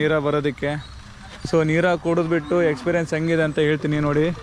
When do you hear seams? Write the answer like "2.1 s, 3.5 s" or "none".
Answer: none